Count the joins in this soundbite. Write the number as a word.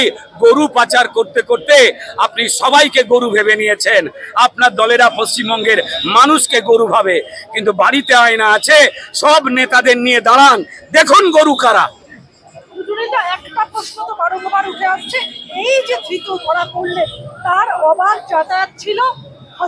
zero